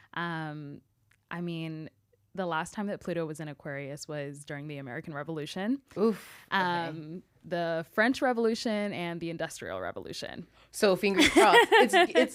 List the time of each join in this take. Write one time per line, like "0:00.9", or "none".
none